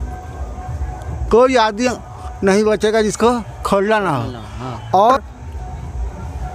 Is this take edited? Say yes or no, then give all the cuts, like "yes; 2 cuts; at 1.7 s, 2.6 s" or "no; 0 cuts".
no; 0 cuts